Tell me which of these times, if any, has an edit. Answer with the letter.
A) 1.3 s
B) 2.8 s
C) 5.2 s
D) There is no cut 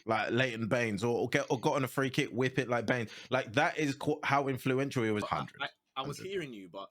C